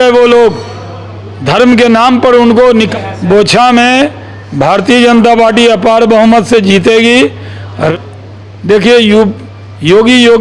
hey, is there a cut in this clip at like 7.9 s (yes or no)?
yes